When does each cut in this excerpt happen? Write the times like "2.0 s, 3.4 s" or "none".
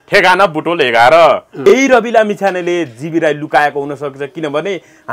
1.6 s